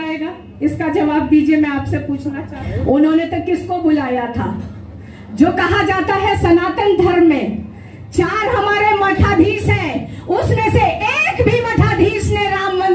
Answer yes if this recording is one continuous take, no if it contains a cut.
no